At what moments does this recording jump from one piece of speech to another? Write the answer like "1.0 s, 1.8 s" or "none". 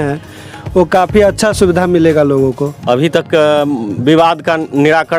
2.7 s